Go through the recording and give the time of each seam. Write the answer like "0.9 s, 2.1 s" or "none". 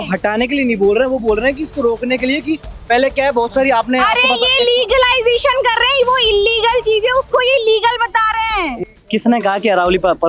8.8 s